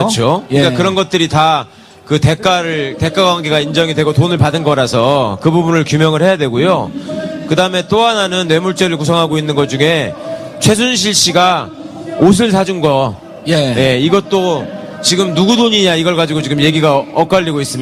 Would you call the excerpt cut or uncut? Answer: uncut